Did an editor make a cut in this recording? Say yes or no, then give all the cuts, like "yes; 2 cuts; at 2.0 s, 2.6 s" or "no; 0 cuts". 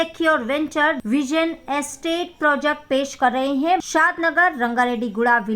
yes; 2 cuts; at 1.0 s, 3.8 s